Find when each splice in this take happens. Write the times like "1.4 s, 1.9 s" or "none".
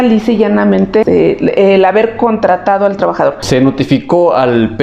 1.0 s, 3.4 s